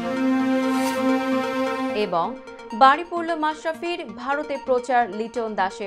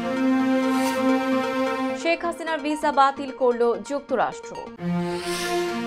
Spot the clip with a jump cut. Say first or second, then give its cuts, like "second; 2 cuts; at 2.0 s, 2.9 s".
first; 1 cut; at 1.9 s